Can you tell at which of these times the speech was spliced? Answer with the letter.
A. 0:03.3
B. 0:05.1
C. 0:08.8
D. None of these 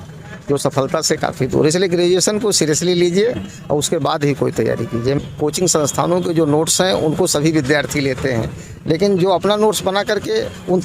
B